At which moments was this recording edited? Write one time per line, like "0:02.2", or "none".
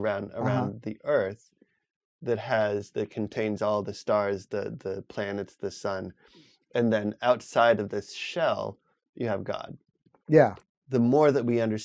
0:10.6